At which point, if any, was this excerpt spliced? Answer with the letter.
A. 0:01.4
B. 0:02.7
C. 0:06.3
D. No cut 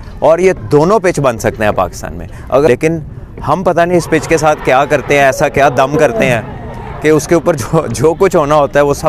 B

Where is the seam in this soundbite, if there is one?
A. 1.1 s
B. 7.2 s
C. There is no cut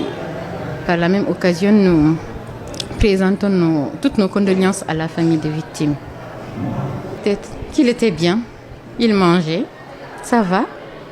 B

